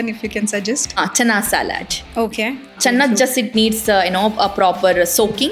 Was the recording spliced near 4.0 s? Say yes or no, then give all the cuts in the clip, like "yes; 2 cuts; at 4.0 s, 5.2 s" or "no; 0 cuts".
no; 2 cuts; at 0.9 s, 2.8 s